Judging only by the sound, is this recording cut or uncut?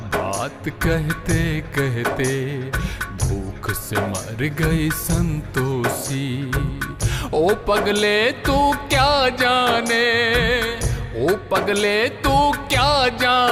uncut